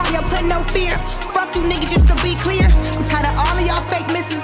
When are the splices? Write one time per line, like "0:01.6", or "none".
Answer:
none